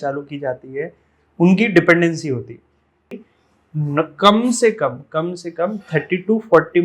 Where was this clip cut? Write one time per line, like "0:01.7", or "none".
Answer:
0:03.2